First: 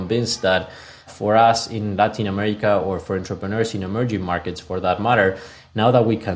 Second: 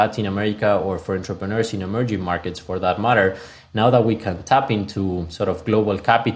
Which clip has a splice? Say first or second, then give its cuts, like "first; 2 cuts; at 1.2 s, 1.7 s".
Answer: first; 1 cut; at 1.1 s